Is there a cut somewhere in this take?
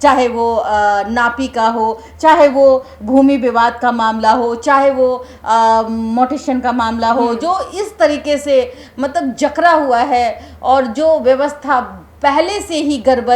no; 0 cuts

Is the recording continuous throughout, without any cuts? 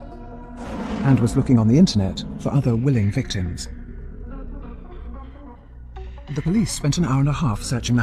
no; 1 cut; at 6.0 s

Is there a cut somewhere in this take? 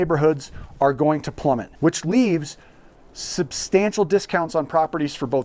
no; 0 cuts

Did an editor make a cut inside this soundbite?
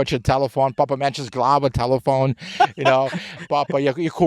no; 0 cuts

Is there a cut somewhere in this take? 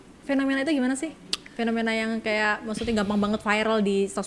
no; 0 cuts

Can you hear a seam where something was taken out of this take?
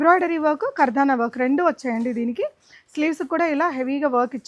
no; 0 cuts

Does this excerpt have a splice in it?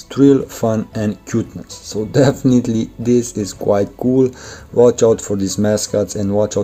no; 0 cuts

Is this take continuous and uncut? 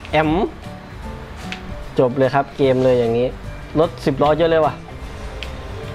no; 1 cut; at 3.5 s

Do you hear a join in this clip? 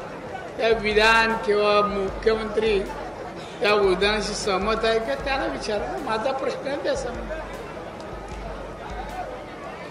no; 0 cuts

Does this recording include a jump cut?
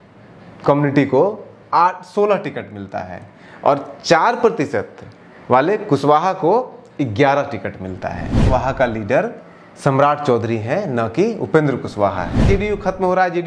yes; 2 cuts; at 8.3 s, 12.4 s

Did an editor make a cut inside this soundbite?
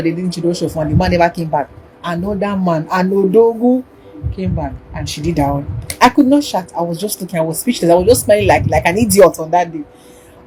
no; 0 cuts

